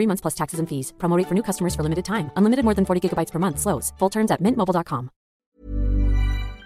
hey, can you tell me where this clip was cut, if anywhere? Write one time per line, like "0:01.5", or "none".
0:05.5